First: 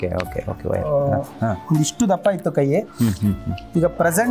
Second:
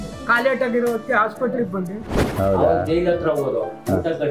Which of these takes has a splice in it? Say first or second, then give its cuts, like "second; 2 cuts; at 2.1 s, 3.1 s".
second; 1 cut; at 2.2 s